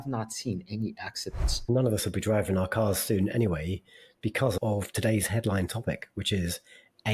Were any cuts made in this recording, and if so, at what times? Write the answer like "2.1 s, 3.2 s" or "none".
1.6 s, 4.6 s